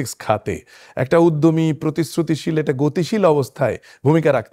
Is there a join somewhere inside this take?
no; 0 cuts

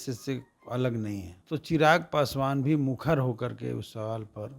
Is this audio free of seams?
no; 1 cut; at 1.3 s

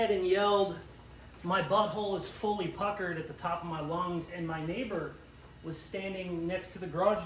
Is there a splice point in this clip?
no; 0 cuts

